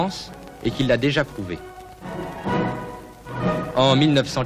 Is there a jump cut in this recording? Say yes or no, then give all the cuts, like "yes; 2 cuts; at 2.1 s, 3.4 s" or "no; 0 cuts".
no; 0 cuts